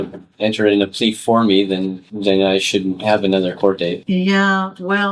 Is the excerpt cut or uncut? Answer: uncut